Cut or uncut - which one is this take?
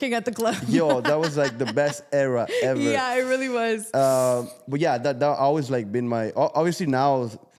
uncut